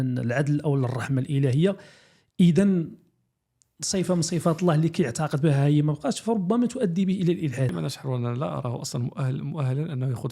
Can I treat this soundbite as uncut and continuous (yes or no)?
no